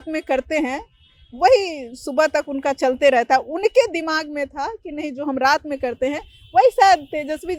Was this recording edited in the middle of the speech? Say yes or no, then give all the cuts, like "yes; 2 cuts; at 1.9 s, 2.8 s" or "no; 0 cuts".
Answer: no; 0 cuts